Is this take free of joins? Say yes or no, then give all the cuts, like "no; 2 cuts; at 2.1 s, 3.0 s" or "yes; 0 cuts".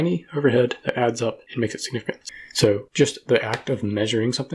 no; 1 cut; at 2.2 s